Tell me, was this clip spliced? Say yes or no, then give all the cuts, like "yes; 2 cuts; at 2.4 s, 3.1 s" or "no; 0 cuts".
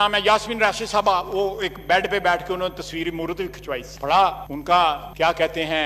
no; 0 cuts